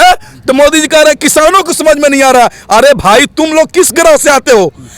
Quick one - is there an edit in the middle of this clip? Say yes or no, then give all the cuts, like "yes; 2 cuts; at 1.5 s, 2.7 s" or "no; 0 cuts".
no; 0 cuts